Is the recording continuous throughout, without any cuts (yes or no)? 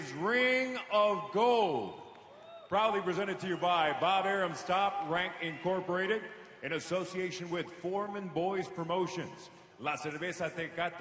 no